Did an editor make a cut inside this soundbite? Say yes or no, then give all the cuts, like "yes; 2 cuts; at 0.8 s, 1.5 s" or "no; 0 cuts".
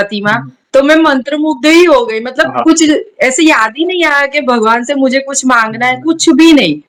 no; 0 cuts